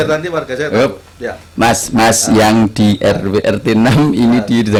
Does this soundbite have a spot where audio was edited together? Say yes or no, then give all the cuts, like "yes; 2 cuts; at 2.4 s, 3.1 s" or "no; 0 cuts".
no; 0 cuts